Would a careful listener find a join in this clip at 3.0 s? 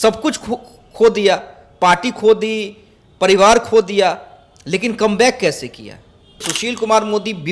no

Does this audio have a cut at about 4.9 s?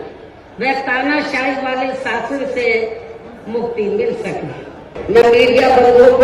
yes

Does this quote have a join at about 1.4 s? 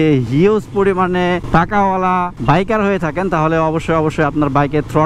yes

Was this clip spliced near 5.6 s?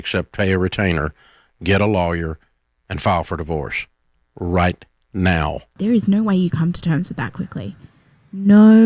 yes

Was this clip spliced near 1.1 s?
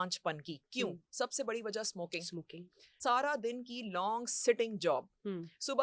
no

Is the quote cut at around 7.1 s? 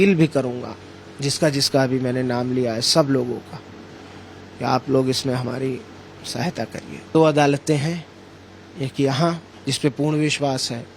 yes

